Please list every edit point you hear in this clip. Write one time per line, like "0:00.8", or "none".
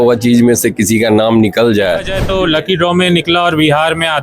0:02.2